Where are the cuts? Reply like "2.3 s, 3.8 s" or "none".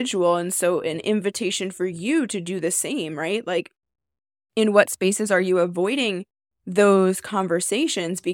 none